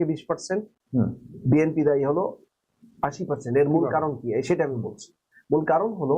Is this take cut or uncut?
uncut